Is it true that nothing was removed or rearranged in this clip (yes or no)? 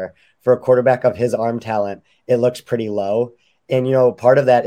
yes